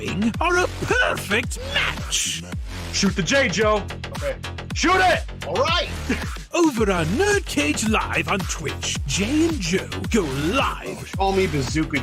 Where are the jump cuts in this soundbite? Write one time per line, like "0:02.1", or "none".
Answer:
none